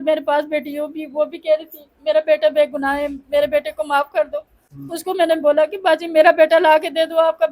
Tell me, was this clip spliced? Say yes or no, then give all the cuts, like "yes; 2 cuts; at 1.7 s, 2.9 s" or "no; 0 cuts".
no; 0 cuts